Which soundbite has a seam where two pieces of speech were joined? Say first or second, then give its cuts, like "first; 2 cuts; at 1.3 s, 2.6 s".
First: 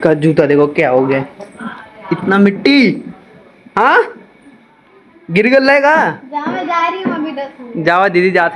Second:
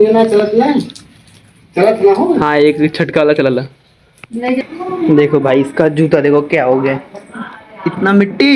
second; 1 cut; at 4.6 s